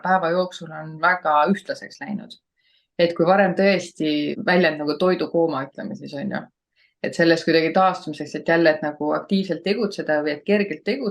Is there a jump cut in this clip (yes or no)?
yes